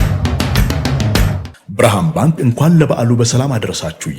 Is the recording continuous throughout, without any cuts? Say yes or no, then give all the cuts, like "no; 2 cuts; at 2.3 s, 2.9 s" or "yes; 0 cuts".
no; 1 cut; at 1.5 s